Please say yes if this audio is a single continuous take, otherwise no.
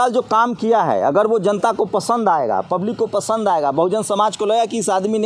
yes